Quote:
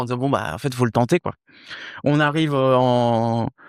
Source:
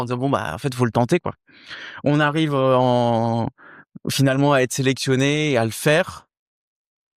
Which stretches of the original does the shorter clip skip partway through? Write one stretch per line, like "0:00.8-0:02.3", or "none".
none